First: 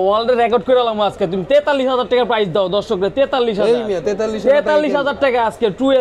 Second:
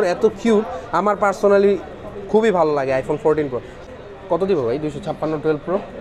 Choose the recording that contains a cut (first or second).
second